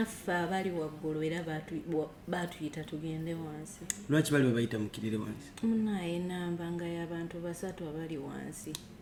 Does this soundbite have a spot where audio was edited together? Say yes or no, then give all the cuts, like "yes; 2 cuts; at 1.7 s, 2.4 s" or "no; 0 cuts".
no; 0 cuts